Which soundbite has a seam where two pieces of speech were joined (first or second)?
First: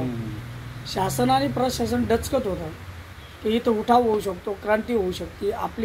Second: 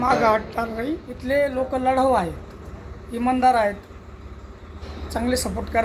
second